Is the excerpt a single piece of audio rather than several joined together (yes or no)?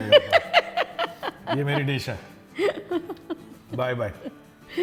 yes